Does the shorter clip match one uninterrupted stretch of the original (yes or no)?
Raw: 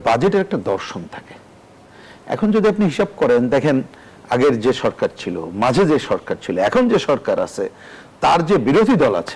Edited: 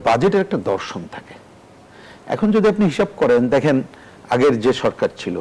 yes